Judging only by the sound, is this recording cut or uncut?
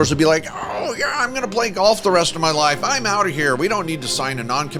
uncut